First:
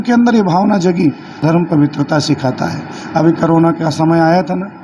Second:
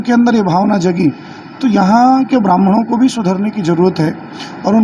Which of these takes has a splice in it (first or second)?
first